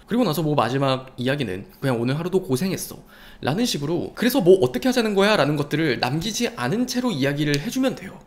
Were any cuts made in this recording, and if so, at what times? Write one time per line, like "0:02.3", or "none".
0:01.8